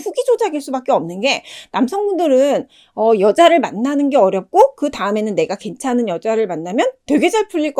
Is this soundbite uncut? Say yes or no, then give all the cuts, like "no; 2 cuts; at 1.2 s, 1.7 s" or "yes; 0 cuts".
yes; 0 cuts